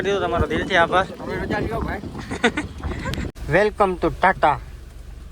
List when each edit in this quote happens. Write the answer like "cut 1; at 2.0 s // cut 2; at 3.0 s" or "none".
cut 1; at 3.3 s